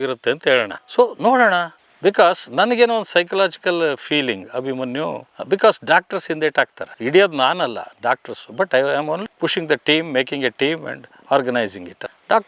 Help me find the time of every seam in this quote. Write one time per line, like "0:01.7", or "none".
0:01.8